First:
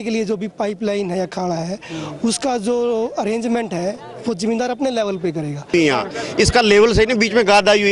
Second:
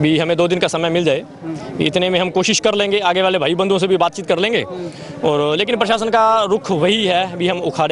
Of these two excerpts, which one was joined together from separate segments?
first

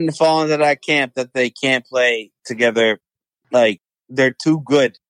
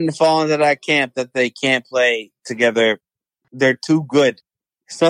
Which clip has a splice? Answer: second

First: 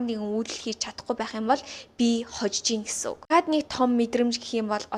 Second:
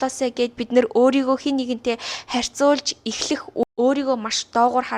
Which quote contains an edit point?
second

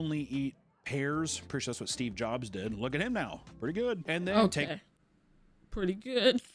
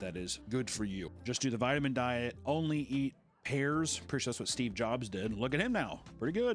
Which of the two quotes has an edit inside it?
second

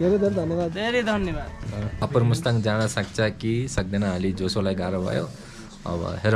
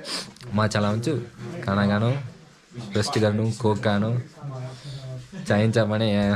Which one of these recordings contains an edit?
first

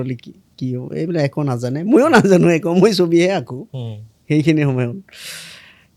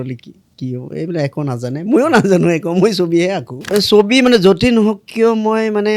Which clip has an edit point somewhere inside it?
second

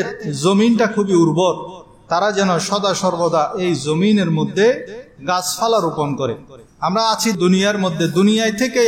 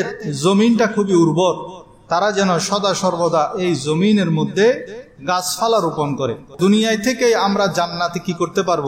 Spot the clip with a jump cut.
second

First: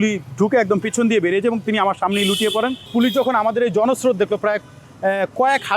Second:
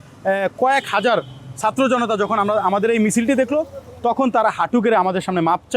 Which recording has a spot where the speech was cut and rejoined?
first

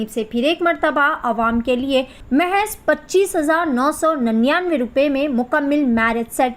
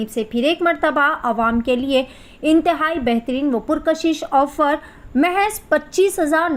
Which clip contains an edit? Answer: first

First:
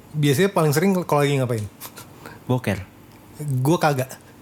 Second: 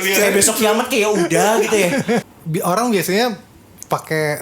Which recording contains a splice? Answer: second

